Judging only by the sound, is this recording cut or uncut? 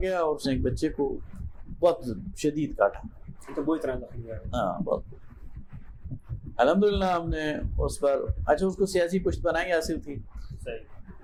uncut